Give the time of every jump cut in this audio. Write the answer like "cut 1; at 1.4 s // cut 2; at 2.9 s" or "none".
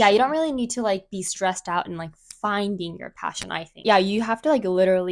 cut 1; at 3.8 s

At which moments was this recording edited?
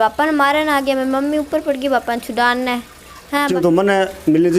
cut 1; at 3.5 s

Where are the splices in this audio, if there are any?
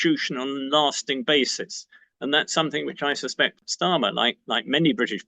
cut 1; at 3.6 s

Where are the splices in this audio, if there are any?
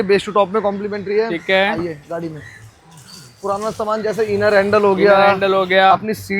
none

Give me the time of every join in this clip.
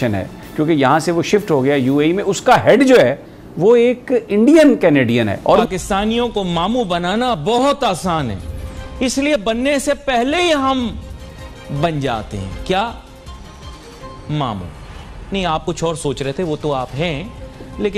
cut 1; at 5.6 s

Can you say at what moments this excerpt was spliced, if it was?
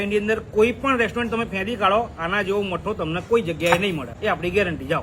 cut 1; at 4.1 s

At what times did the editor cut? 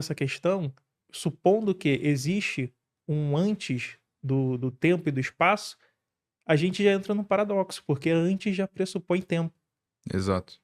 cut 1; at 2.1 s

